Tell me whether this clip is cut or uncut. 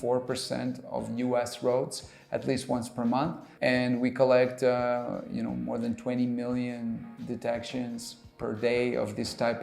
cut